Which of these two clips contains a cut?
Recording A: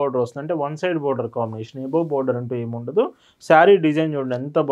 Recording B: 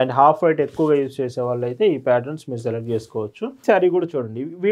B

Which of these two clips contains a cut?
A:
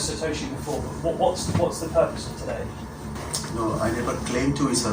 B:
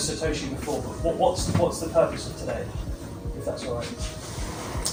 A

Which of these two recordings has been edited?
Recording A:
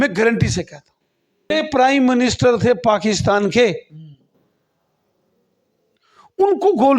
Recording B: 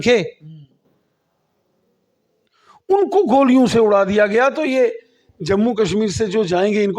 A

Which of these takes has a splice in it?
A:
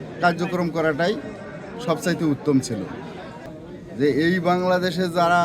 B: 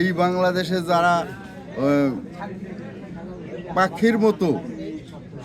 A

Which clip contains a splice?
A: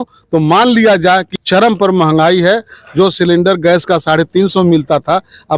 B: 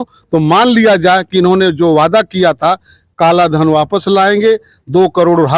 A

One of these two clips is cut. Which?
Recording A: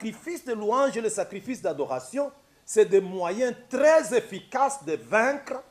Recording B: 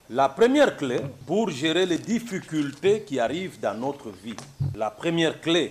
B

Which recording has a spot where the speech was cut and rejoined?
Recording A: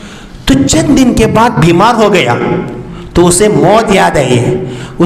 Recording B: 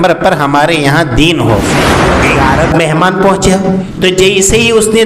B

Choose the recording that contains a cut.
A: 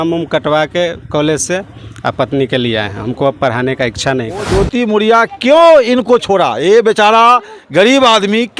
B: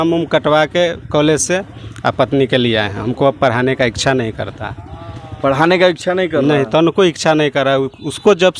A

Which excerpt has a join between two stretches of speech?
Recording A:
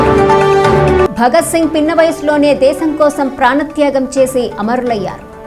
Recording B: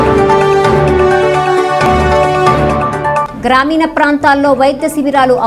A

